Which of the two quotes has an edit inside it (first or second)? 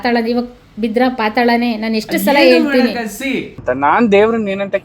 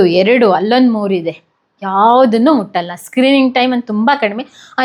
first